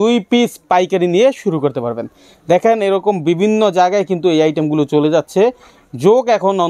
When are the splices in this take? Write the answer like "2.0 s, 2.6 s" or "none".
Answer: none

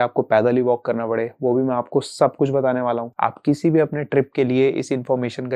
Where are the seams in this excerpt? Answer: 3.1 s

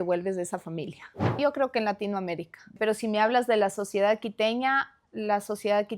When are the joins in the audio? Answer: 1.4 s, 2.8 s

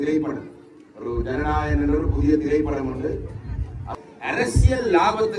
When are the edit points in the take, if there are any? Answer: 3.8 s

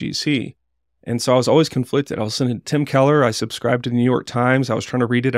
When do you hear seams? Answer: none

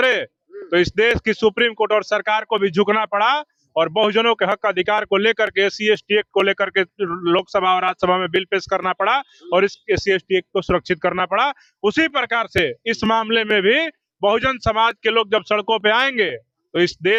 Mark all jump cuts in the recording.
none

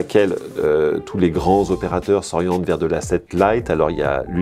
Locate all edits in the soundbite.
none

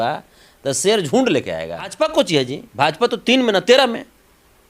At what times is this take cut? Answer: 1.9 s

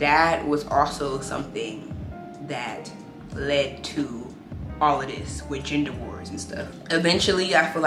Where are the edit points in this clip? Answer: none

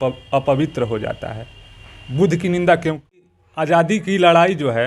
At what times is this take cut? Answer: 3.4 s

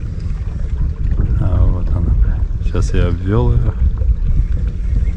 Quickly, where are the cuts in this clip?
none

